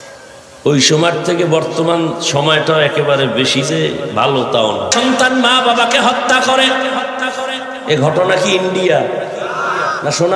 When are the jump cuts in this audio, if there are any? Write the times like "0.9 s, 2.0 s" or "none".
4.9 s